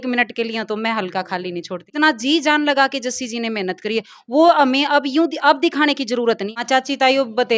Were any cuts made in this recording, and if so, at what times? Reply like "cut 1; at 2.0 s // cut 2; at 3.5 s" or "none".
cut 1; at 1.8 s // cut 2; at 6.5 s